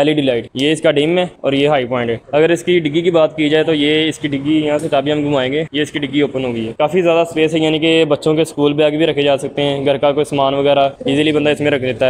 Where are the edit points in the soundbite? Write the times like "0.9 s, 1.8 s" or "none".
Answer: 2.2 s